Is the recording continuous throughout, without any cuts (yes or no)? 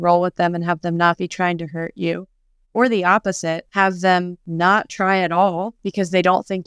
yes